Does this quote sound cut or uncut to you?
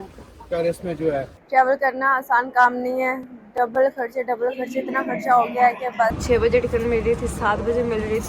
cut